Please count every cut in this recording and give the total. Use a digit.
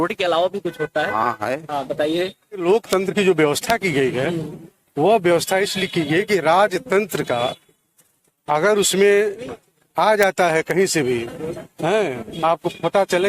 1